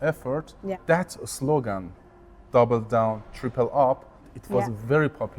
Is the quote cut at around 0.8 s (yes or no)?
yes